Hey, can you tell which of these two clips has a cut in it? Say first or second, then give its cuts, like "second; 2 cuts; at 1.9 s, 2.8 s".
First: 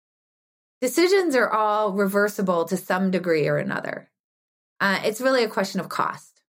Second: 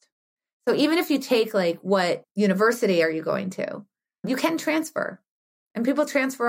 second; 2 cuts; at 2.3 s, 4.3 s